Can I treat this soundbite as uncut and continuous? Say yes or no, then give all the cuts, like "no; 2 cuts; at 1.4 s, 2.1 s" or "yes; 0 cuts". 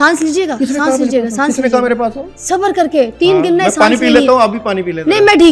yes; 0 cuts